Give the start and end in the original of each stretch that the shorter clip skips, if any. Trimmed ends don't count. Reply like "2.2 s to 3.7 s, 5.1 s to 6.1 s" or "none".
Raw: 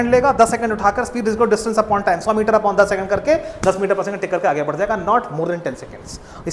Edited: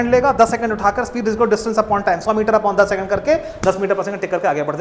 none